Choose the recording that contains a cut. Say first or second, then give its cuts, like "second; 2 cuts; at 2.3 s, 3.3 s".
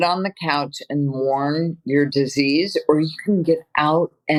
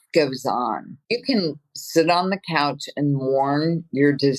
second; 1 cut; at 0.9 s